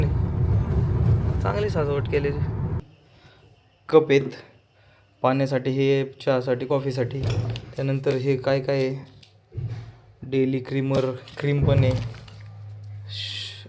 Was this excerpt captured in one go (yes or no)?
no